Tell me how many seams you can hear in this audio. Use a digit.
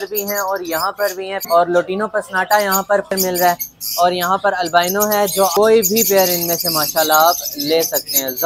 3